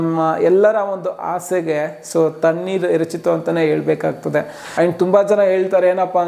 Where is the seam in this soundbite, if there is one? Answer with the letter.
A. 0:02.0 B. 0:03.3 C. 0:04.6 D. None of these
C